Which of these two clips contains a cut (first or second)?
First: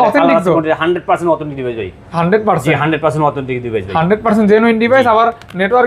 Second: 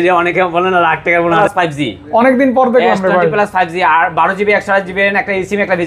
second